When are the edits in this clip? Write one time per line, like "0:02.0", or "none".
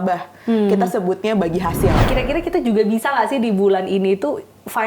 0:02.0